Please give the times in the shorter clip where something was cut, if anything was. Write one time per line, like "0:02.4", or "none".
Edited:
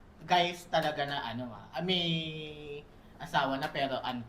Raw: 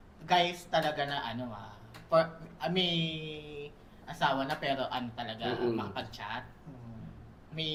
0:01.6